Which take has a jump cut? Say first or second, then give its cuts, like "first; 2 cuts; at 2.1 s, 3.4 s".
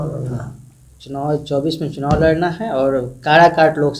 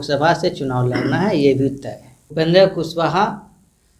second; 1 cut; at 2.2 s